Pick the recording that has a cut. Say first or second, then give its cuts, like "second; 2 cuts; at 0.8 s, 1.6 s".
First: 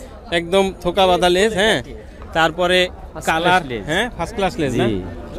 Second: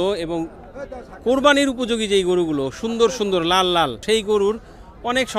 second; 1 cut; at 4.0 s